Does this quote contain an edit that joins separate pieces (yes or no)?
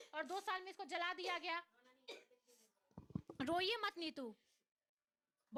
no